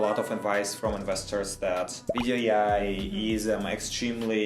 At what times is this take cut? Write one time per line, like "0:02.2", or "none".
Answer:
0:02.1